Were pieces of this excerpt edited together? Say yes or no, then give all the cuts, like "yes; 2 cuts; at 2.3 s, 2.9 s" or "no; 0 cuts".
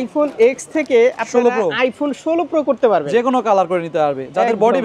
no; 0 cuts